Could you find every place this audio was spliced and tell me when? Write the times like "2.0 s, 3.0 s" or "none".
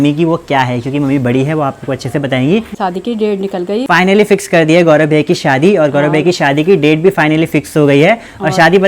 2.7 s, 3.9 s